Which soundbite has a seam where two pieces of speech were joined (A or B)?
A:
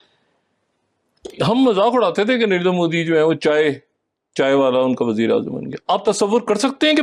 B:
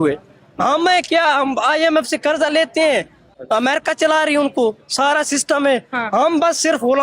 B